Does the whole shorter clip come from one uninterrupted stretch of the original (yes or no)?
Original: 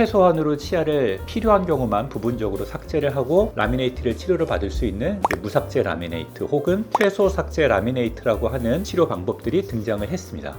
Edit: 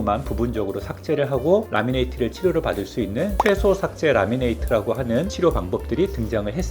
no